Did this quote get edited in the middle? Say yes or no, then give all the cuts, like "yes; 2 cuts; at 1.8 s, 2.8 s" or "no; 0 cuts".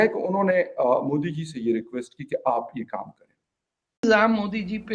yes; 1 cut; at 3.8 s